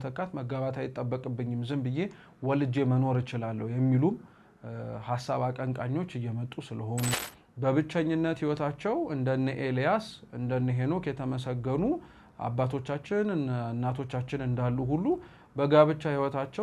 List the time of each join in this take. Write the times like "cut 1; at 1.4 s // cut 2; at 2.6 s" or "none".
cut 1; at 7.2 s